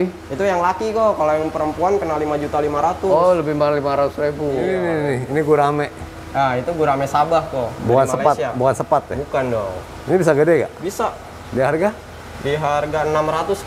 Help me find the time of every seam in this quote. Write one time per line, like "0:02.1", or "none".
0:04.7